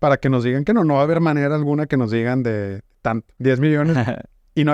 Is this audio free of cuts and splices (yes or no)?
no